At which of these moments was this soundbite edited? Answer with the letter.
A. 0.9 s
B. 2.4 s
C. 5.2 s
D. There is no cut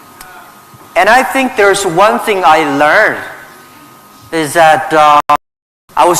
C